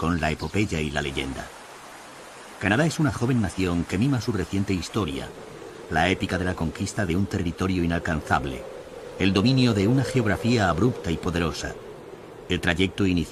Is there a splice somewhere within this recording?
no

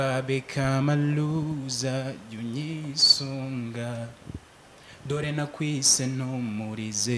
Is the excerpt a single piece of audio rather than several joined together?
yes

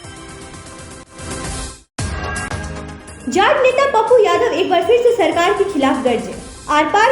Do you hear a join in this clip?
yes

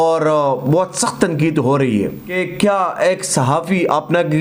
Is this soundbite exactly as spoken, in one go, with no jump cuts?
no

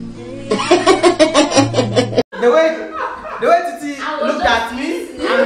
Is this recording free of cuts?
yes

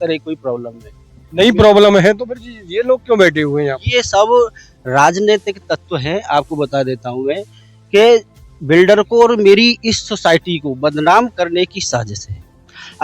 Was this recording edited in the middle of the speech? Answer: no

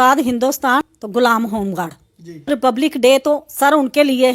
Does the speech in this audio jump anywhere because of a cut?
yes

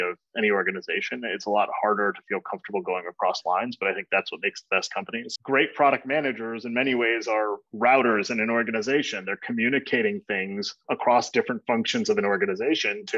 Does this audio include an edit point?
no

